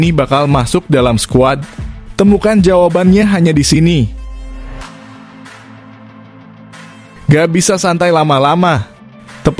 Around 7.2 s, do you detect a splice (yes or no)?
yes